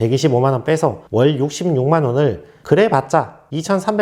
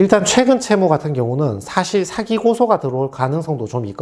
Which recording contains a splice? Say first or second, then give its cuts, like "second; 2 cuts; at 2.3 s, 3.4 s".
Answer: first; 1 cut; at 2.6 s